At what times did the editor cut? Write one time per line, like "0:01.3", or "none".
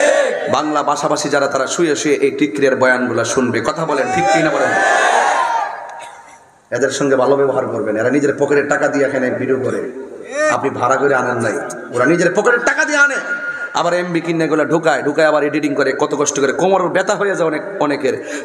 none